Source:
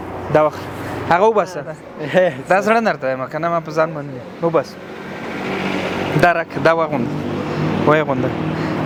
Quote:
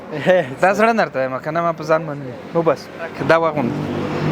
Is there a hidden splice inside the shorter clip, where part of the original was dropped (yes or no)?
yes